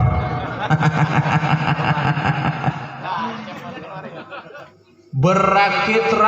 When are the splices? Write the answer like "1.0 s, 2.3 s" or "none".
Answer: 4.7 s